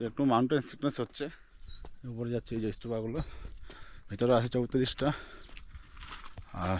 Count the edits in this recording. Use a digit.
1